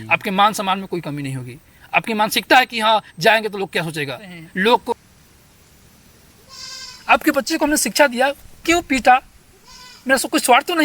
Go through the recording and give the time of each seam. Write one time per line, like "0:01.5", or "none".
0:05.0